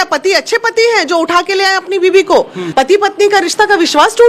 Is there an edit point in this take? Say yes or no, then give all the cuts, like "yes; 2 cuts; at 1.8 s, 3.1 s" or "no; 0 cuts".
yes; 1 cut; at 2.6 s